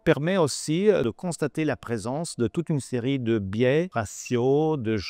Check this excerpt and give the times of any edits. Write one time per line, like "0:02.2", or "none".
0:01.0
0:03.9